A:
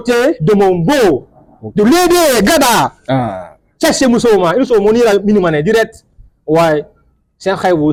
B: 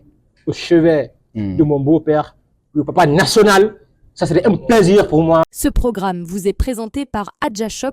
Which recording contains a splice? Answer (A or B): B